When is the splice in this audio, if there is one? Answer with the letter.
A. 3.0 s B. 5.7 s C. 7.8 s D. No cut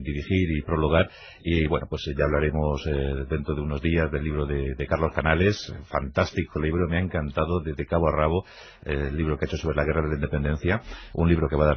D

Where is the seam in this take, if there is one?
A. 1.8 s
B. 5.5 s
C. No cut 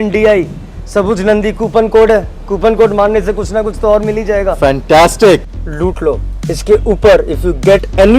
B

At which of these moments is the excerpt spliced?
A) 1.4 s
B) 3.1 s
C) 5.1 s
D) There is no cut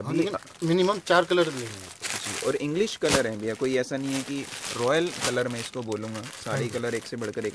D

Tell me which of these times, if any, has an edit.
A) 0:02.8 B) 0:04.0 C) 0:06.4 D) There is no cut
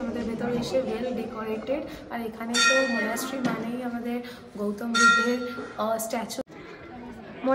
C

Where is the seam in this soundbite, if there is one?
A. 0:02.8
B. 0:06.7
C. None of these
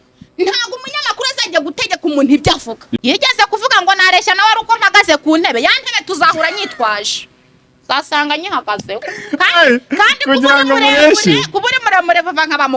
A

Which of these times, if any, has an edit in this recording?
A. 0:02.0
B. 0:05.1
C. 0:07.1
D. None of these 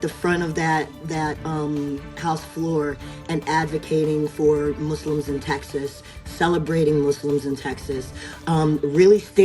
D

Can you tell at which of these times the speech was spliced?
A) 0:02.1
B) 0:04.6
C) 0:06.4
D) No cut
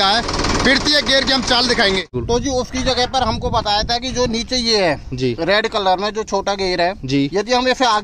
A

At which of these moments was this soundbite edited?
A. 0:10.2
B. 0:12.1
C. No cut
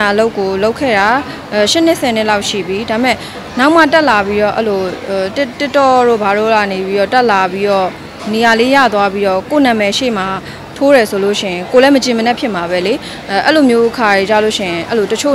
C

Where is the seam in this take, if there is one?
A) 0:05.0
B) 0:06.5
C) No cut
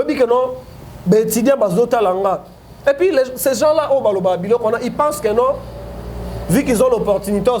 C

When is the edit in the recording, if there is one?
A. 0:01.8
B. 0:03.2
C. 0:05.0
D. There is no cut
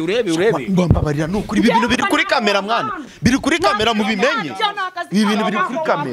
D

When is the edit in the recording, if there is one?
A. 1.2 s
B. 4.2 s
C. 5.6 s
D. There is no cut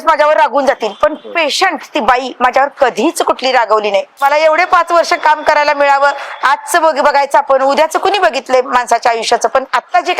B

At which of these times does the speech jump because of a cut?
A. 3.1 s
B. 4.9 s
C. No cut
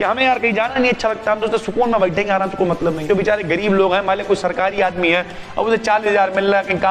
A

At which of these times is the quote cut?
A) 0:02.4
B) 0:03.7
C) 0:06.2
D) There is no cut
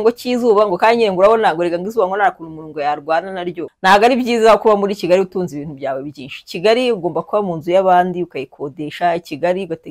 B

